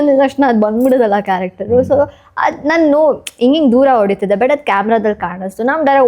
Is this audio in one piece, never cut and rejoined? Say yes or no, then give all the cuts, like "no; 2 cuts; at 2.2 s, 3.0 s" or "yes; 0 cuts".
yes; 0 cuts